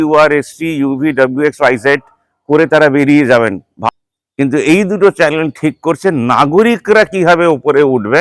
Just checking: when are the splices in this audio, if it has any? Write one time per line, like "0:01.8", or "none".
0:03.7